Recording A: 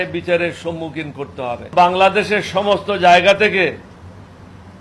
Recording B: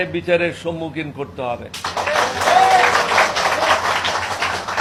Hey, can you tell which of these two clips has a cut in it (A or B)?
A